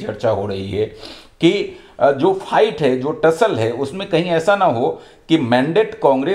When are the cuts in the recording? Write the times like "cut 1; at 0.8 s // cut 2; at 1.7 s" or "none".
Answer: none